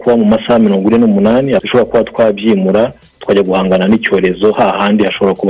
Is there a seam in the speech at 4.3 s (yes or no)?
no